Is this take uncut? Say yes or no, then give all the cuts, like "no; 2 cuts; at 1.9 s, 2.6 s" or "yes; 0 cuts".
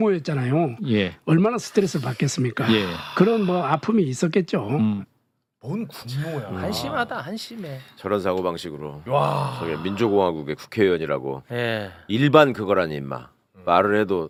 yes; 0 cuts